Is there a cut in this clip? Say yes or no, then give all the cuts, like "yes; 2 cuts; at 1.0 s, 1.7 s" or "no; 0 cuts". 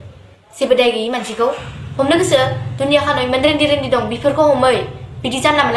no; 0 cuts